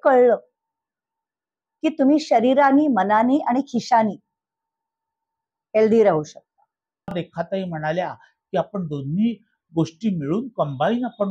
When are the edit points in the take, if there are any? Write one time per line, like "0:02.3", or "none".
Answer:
0:07.1